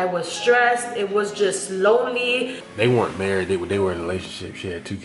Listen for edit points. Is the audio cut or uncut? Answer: cut